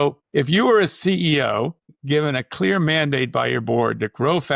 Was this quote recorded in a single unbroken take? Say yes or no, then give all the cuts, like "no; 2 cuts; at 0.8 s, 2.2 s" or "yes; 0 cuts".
no; 1 cut; at 1.9 s